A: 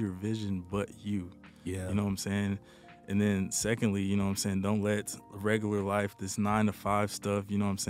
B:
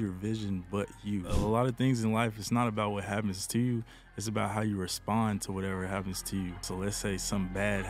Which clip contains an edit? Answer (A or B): B